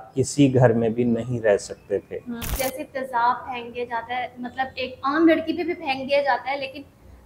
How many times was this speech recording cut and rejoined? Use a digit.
1